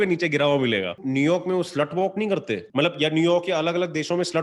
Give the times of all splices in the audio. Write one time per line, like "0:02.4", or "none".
0:01.0
0:02.7